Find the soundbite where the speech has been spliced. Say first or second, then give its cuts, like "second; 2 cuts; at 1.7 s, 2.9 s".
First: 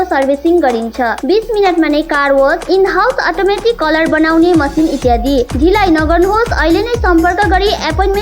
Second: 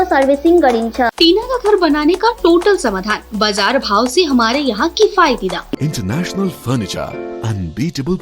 second; 2 cuts; at 1.1 s, 5.8 s